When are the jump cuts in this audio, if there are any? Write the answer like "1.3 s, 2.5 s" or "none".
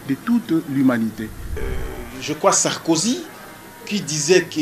1.6 s